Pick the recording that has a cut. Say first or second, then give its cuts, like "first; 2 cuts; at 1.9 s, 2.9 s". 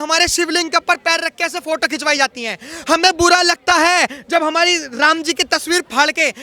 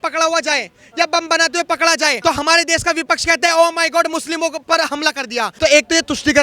second; 2 cuts; at 2.2 s, 5.5 s